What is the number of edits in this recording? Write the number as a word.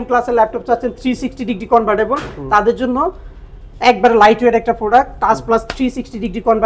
zero